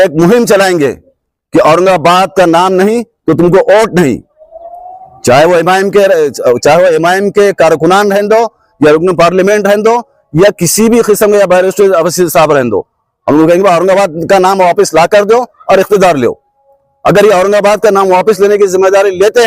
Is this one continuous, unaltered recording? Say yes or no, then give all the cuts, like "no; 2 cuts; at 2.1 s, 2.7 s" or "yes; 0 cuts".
yes; 0 cuts